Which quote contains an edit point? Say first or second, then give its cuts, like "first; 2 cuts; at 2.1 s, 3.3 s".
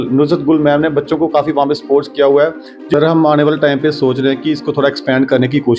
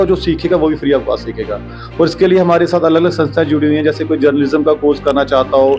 first; 1 cut; at 2.9 s